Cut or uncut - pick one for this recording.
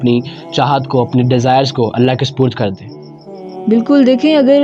uncut